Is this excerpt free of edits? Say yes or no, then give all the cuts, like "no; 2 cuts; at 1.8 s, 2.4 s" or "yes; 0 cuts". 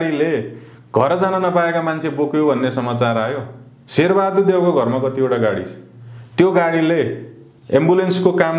yes; 0 cuts